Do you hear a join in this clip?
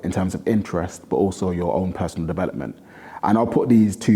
no; 0 cuts

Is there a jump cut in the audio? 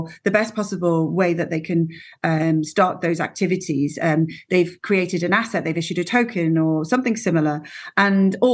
no; 0 cuts

